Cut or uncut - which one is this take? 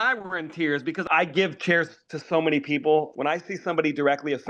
cut